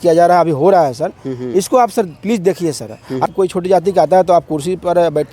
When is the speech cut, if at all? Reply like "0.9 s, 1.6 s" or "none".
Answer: 3.3 s